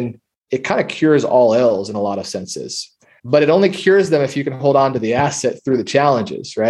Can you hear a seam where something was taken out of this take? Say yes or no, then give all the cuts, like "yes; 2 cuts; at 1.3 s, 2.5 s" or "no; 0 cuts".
no; 0 cuts